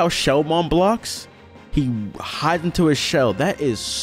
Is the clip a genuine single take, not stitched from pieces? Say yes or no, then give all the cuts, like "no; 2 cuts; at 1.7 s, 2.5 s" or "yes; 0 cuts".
yes; 0 cuts